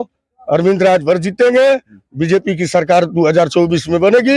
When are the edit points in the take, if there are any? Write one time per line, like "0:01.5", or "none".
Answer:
none